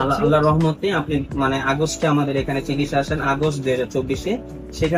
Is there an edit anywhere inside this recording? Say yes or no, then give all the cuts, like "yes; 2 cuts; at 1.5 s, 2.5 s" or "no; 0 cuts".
no; 0 cuts